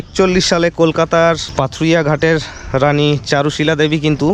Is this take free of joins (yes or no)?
no